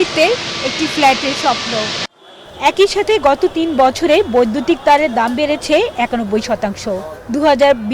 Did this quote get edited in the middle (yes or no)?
no